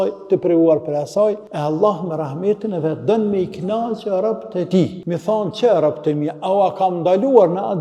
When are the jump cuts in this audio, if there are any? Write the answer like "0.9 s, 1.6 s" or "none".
1.5 s, 5.0 s